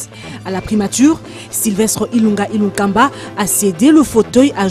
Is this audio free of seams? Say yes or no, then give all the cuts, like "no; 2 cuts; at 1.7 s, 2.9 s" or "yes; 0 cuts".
yes; 0 cuts